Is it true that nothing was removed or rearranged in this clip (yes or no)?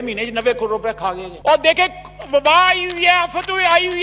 yes